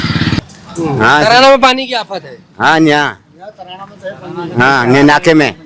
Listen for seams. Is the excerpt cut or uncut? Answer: uncut